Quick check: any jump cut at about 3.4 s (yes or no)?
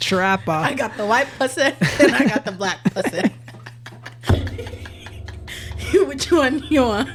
no